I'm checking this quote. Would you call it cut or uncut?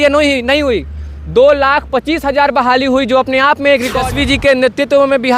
cut